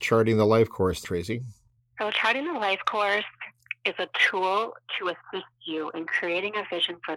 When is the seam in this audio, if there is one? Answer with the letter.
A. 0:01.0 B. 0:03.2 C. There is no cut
A